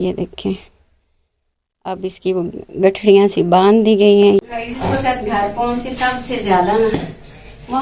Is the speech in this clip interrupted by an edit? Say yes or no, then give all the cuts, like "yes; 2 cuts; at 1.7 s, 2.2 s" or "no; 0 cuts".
yes; 1 cut; at 4.4 s